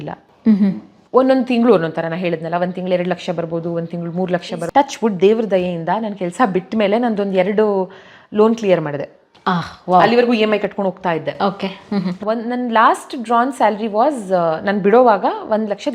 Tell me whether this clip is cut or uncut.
cut